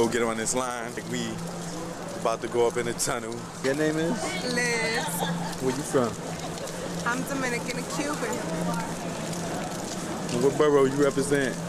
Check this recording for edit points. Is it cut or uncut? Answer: uncut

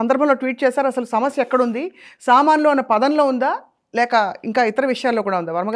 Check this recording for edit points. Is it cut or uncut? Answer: uncut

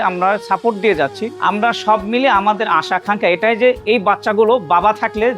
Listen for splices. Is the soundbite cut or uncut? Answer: uncut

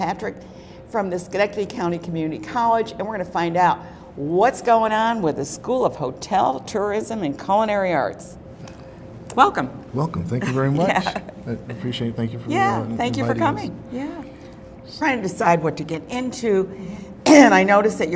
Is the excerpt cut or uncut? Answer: uncut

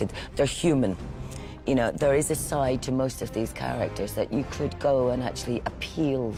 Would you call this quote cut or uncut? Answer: uncut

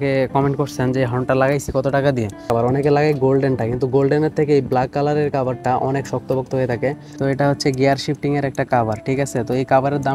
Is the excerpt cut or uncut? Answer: cut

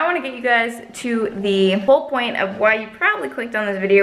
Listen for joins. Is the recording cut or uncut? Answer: cut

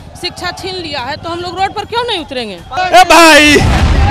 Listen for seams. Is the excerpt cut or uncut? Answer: cut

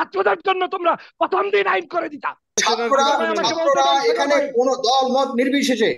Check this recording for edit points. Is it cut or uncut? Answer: cut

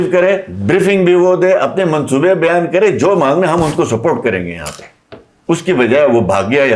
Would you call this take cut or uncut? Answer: uncut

